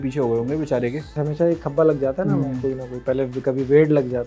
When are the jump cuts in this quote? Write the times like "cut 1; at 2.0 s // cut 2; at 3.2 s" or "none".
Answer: cut 1; at 1.2 s